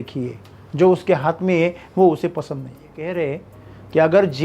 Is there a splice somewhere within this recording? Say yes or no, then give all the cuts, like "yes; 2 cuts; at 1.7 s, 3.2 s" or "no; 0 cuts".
yes; 1 cut; at 3.1 s